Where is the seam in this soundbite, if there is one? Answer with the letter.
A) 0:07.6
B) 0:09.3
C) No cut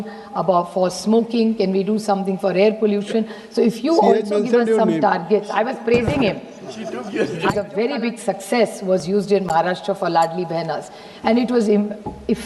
A